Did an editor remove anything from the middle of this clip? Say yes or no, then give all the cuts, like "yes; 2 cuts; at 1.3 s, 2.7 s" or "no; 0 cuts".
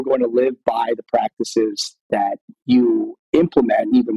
yes; 1 cut; at 2.2 s